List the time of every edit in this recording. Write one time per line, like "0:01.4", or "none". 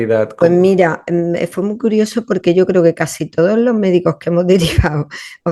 none